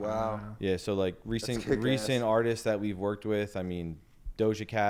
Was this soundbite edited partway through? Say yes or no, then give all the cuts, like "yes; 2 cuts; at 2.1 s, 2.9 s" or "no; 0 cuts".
no; 0 cuts